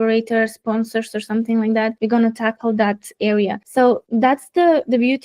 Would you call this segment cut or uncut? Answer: cut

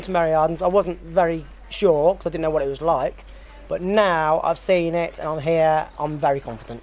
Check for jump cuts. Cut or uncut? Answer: uncut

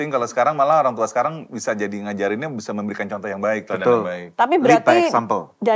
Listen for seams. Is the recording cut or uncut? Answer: uncut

